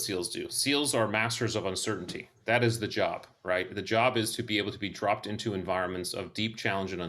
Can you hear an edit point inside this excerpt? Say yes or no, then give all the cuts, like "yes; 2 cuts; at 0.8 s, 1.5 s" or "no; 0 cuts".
no; 0 cuts